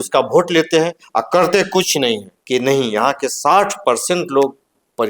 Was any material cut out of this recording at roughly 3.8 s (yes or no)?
no